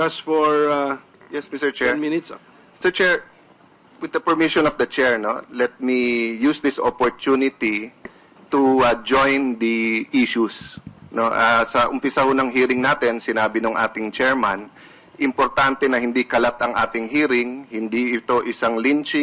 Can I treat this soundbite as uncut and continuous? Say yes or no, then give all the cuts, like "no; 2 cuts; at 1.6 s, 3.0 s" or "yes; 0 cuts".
yes; 0 cuts